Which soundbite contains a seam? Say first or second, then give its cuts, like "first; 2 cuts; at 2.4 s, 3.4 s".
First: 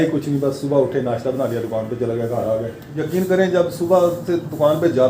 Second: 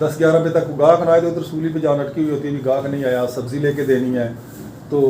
first; 1 cut; at 3.0 s